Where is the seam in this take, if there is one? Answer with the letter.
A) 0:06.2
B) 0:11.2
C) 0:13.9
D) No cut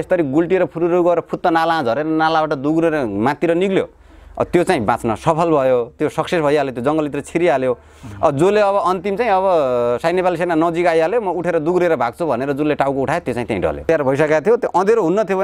C